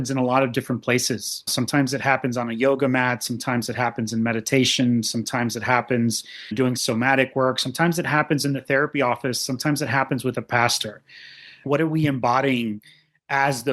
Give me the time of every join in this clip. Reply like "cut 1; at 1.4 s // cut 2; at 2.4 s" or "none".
cut 1; at 1.5 s // cut 2; at 6.6 s // cut 3; at 11.6 s